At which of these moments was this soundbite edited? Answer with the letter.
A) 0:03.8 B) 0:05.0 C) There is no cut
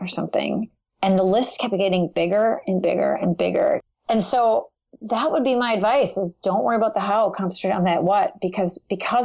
A